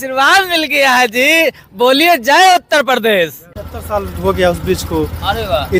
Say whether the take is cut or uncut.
cut